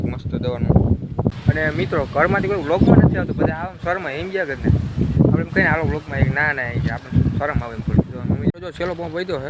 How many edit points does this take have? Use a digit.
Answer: 2